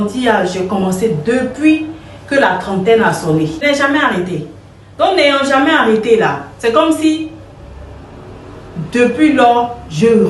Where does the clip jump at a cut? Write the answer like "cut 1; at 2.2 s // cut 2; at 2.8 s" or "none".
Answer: cut 1; at 3.6 s